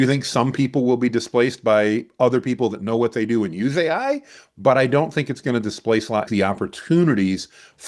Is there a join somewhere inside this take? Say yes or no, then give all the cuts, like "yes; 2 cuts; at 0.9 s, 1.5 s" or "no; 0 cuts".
yes; 1 cut; at 6.3 s